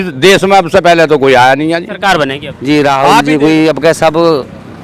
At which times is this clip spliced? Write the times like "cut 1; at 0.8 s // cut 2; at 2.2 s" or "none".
cut 1; at 2.0 s